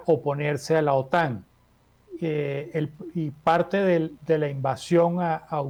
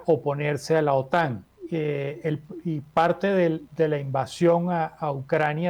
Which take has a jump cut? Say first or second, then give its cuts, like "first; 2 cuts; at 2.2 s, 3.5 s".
second; 1 cut; at 1.5 s